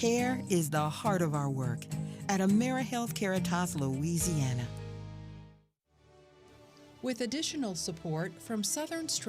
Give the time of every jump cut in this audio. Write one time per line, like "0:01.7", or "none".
0:07.0